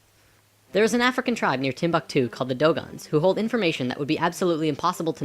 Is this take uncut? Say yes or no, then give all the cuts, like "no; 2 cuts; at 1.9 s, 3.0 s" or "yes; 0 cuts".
no; 1 cut; at 3.0 s